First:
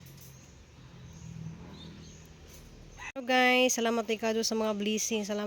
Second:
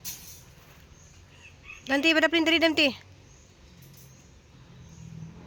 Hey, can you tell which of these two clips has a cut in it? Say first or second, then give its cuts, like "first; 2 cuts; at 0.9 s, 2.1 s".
first; 1 cut; at 3.1 s